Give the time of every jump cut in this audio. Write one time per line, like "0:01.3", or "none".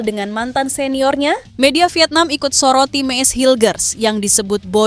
0:01.5